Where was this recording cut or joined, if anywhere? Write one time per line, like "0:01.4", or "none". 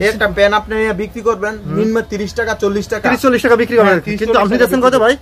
none